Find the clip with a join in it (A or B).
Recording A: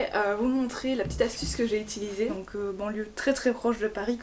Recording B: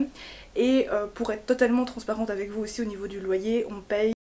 A